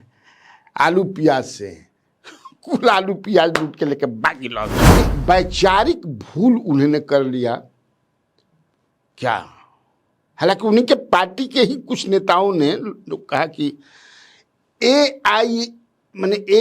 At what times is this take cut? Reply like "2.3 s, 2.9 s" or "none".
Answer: 4.8 s